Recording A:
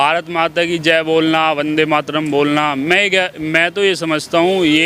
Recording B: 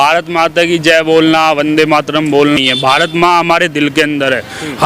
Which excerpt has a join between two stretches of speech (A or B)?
B